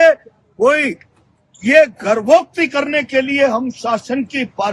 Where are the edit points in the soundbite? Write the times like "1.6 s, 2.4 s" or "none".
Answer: none